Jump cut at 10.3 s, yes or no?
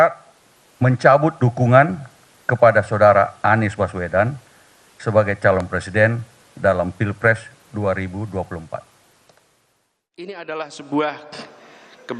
yes